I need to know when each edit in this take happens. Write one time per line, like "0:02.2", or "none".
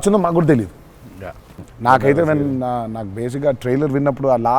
0:01.5